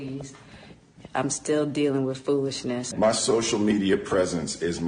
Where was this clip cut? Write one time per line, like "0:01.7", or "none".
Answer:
0:02.9